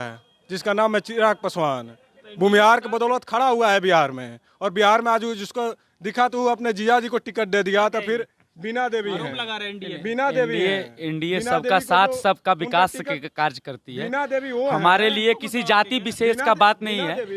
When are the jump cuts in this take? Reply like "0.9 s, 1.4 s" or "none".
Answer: none